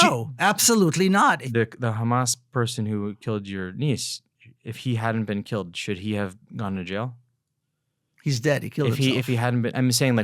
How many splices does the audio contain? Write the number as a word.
one